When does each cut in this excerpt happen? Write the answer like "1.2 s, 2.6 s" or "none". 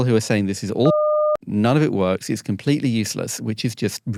none